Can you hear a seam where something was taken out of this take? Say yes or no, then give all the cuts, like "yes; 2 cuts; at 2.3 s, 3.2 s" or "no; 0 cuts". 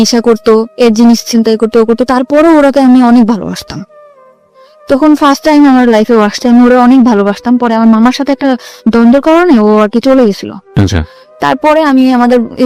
no; 0 cuts